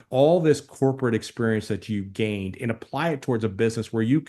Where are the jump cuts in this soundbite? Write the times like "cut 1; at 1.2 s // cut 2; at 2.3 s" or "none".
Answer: none